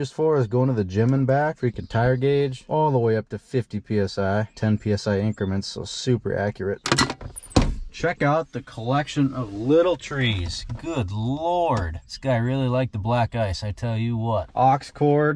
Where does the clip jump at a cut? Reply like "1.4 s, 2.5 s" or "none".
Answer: none